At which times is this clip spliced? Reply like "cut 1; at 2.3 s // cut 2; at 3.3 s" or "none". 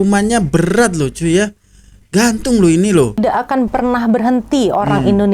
cut 1; at 3.2 s